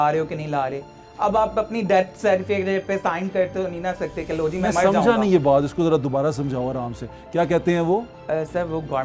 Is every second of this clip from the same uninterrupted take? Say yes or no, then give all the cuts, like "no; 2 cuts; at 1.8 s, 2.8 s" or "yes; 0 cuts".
yes; 0 cuts